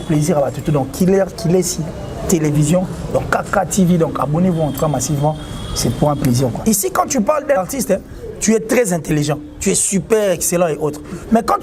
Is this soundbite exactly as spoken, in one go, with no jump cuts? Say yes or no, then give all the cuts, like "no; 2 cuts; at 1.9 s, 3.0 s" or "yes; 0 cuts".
no; 2 cuts; at 6.6 s, 7.6 s